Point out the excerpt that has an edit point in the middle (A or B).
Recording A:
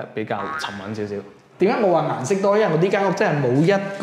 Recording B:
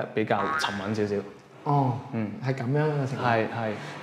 A